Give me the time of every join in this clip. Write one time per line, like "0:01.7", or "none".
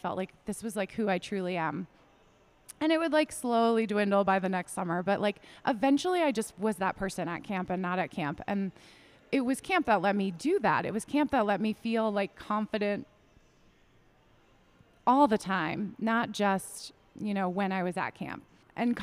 none

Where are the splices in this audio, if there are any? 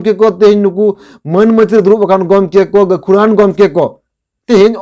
none

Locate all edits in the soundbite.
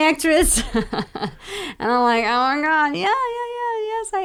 none

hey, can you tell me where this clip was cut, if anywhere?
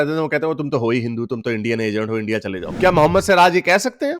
0:02.7

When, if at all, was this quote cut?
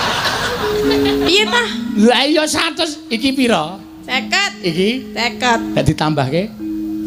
none

